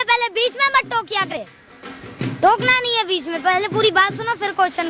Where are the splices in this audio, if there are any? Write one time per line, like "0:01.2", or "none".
0:01.3